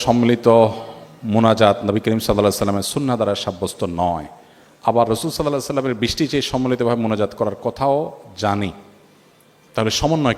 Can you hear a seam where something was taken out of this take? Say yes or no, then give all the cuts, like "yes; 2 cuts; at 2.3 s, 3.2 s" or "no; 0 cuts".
no; 0 cuts